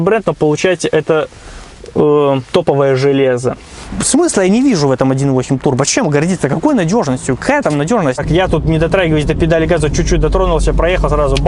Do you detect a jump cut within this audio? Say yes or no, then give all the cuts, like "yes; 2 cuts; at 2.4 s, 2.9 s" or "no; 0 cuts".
yes; 2 cuts; at 3.9 s, 8.2 s